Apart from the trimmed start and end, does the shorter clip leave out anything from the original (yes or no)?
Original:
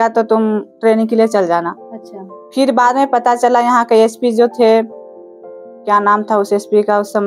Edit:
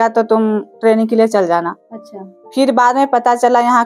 no